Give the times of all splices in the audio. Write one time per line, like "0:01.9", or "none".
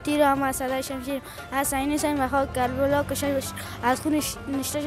none